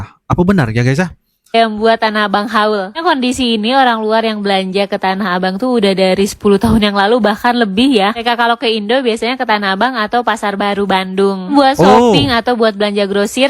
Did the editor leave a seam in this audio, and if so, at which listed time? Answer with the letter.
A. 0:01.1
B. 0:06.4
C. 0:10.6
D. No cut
D